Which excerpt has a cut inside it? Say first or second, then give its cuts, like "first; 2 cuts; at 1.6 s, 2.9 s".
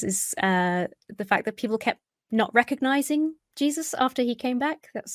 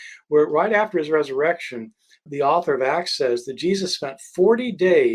second; 1 cut; at 2.2 s